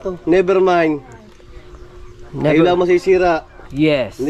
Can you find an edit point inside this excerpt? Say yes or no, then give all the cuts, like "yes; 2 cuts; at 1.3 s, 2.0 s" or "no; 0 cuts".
no; 0 cuts